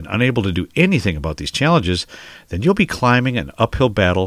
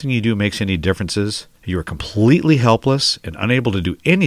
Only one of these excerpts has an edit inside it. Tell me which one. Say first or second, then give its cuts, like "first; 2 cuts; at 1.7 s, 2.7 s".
second; 1 cut; at 1.5 s